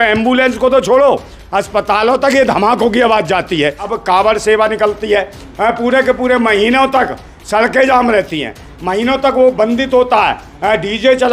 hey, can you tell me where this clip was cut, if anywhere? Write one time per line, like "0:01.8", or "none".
0:03.9